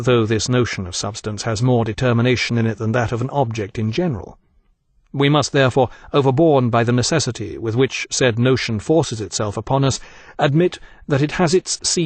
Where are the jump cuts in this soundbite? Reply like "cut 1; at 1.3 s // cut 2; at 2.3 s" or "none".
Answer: cut 1; at 1.0 s